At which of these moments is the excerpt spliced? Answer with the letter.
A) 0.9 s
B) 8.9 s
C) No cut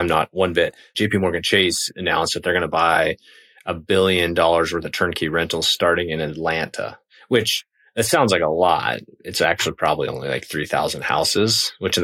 A